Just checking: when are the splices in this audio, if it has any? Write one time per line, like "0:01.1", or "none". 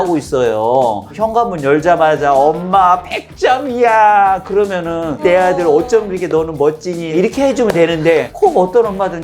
0:01.1
0:05.2
0:07.1